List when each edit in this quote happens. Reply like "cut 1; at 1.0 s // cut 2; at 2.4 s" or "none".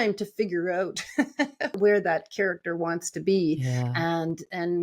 cut 1; at 1.7 s